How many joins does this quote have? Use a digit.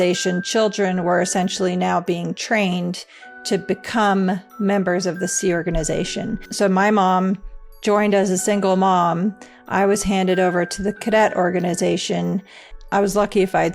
1